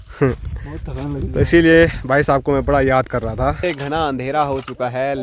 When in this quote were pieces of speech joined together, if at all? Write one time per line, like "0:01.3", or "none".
0:03.6